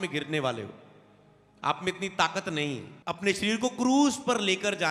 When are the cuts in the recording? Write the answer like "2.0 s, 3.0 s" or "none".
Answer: 2.9 s